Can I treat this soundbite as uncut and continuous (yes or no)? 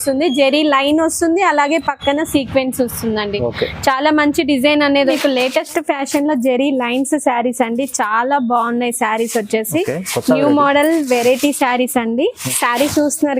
no